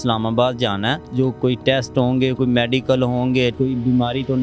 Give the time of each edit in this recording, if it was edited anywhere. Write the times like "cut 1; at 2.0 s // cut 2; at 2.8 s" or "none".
cut 1; at 1.0 s // cut 2; at 3.5 s